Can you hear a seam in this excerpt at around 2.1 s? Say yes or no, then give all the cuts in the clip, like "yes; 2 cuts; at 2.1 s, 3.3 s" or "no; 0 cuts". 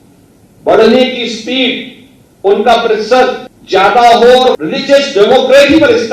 no; 2 cuts; at 3.5 s, 4.6 s